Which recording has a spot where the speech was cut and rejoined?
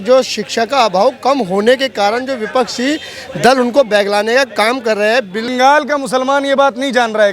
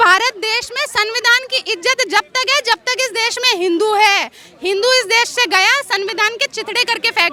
first; 1 cut; at 5.5 s

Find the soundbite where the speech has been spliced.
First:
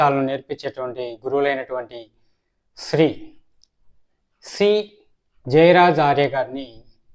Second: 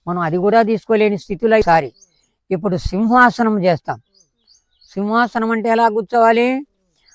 second; 1 cut; at 1.6 s

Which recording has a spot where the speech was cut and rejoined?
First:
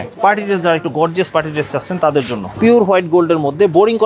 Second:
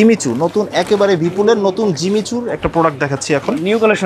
first; 1 cut; at 2.5 s

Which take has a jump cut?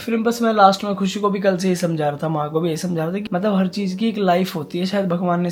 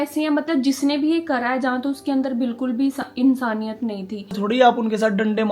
second; 1 cut; at 4.3 s

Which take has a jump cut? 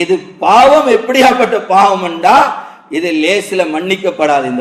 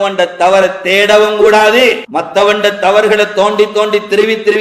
second; 1 cut; at 2.0 s

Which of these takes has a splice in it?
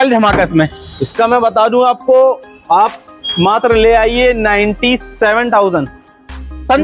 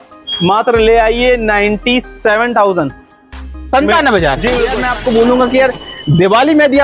second; 1 cut; at 4.8 s

